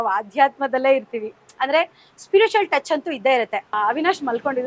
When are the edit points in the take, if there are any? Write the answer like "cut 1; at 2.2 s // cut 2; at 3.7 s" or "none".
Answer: cut 1; at 3.7 s

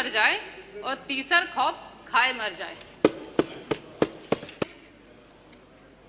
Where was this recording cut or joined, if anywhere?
cut 1; at 4.8 s

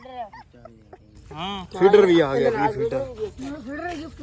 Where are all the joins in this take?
cut 1; at 1.6 s

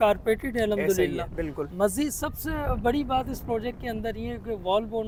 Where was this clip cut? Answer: none

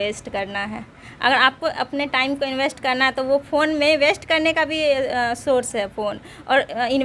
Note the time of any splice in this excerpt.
none

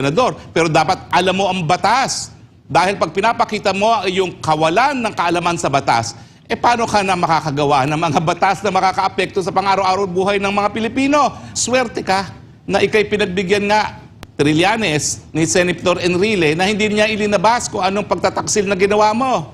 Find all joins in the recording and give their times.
cut 1; at 11.5 s

